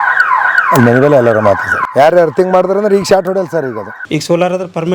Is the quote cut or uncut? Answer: cut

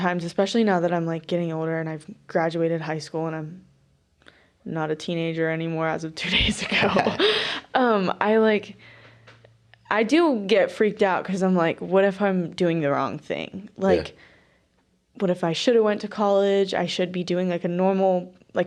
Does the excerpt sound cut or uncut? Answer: uncut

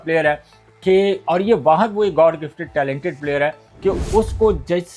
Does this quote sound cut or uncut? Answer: uncut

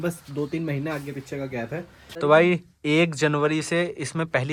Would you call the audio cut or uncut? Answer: uncut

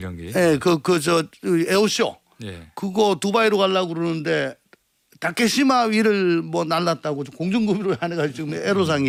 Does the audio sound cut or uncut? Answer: uncut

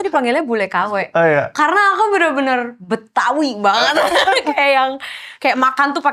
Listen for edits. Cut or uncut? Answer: uncut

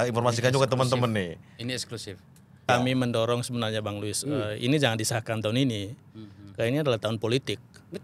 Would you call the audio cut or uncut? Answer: cut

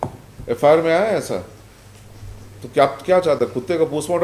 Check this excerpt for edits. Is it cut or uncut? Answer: uncut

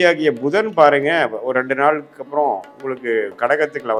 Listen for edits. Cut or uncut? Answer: uncut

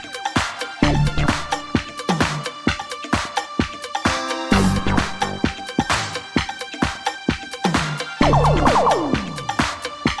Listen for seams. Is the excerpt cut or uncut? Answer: uncut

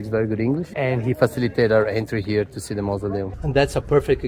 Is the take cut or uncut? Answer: cut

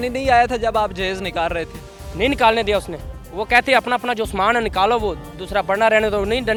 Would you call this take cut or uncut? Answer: uncut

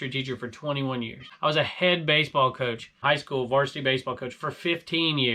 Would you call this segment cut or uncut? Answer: cut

